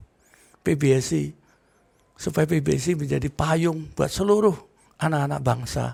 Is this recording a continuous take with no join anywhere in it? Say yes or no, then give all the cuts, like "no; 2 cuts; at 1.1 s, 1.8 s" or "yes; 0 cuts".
yes; 0 cuts